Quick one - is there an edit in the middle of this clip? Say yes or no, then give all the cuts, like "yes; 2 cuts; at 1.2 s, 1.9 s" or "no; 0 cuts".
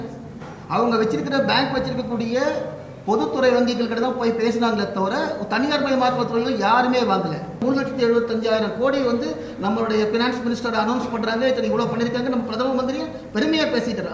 yes; 1 cut; at 7.6 s